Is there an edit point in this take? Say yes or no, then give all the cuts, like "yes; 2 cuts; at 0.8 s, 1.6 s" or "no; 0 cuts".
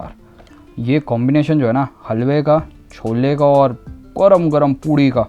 no; 0 cuts